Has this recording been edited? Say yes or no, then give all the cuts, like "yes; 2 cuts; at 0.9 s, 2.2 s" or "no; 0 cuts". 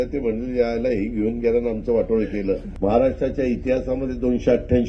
yes; 1 cut; at 2.7 s